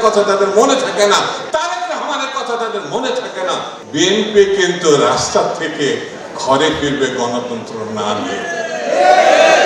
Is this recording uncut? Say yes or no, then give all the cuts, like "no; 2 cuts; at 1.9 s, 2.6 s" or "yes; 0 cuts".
no; 1 cut; at 3.8 s